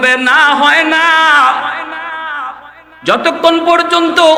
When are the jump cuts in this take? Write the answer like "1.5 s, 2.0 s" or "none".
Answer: none